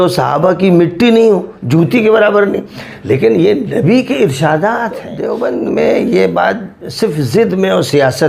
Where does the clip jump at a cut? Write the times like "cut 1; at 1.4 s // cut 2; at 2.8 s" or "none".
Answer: cut 1; at 5.2 s